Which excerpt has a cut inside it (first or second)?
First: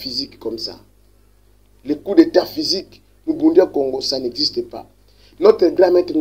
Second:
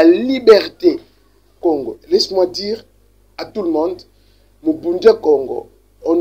second